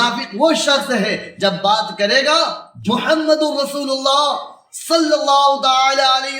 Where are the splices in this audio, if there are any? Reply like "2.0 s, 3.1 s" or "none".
2.7 s